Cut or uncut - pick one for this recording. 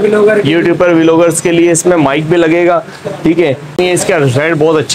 cut